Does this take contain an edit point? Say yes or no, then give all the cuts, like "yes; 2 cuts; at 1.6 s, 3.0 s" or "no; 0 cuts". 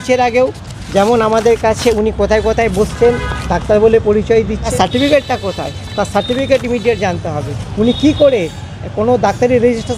yes; 1 cut; at 4.6 s